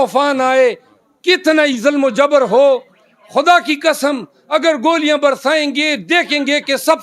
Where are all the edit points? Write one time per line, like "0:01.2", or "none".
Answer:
none